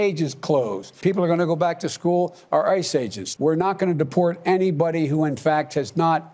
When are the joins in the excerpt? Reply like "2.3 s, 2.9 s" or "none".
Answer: 0.9 s, 3.2 s